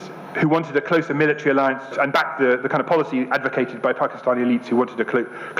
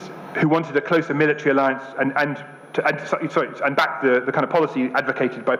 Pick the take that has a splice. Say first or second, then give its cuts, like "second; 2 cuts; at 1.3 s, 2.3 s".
first; 1 cut; at 1.9 s